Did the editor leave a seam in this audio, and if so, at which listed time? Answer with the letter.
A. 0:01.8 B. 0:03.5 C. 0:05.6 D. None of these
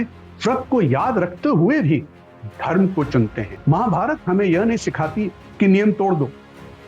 B